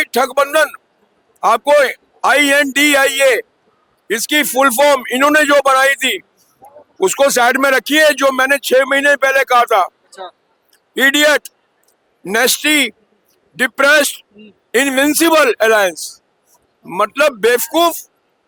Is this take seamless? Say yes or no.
yes